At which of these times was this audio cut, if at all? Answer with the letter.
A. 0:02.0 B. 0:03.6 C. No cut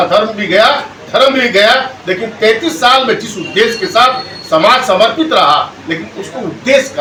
C